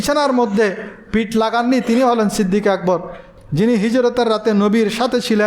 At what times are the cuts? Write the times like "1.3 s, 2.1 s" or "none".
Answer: 3.2 s

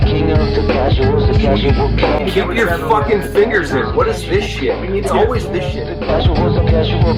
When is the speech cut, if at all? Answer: none

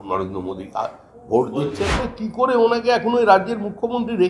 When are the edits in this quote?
2.0 s

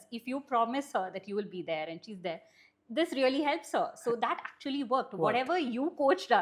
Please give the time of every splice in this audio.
none

